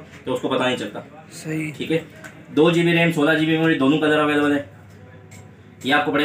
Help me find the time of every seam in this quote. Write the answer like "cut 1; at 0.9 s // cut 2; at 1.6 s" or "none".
none